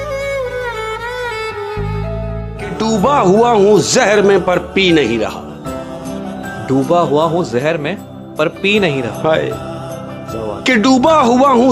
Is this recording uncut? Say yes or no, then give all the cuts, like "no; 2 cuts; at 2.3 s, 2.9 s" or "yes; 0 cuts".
no; 1 cut; at 2.5 s